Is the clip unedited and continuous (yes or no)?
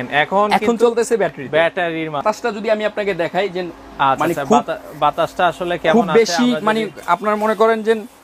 no